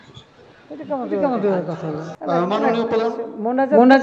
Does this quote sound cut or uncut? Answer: cut